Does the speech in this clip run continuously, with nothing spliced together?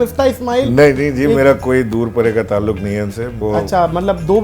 no; 1 cut; at 3.3 s

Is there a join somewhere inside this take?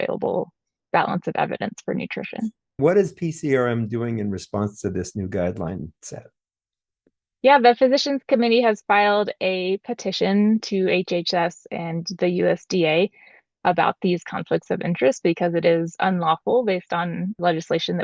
yes; 1 cut; at 2.8 s

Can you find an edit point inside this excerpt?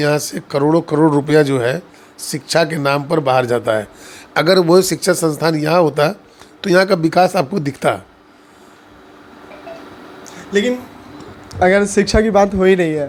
no; 0 cuts

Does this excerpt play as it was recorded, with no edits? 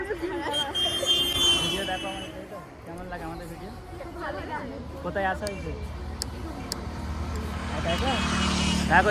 yes; 0 cuts

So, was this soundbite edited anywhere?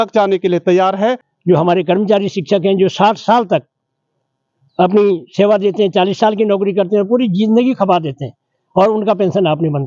yes; 1 cut; at 1.3 s

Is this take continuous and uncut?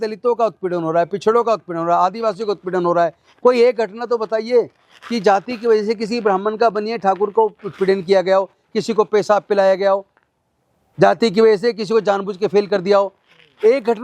yes; 0 cuts

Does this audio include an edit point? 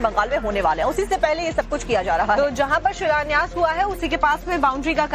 no; 0 cuts

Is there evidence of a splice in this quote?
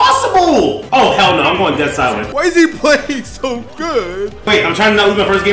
yes; 2 cuts; at 2.3 s, 4.5 s

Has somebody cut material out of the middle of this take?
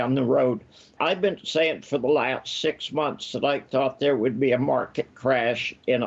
yes; 1 cut; at 0.9 s

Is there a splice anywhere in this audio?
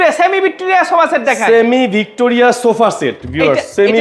no; 0 cuts

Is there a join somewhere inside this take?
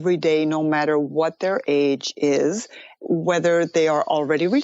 no; 0 cuts

